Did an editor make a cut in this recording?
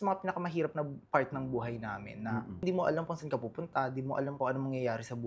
yes; 2 cuts; at 2.6 s, 4.3 s

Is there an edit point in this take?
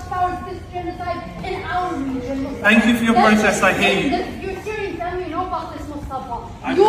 no; 0 cuts

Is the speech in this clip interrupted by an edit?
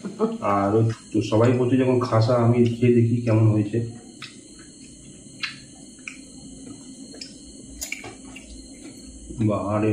yes; 1 cut; at 0.9 s

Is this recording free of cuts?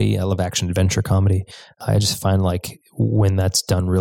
no; 1 cut; at 1.8 s

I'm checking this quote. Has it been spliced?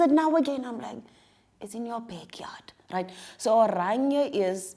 no; 0 cuts

